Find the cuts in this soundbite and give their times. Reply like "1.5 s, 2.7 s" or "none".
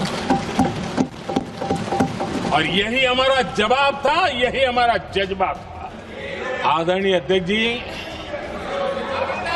5.8 s